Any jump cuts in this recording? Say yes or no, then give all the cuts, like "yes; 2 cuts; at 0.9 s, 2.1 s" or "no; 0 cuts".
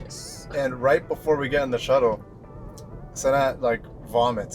no; 0 cuts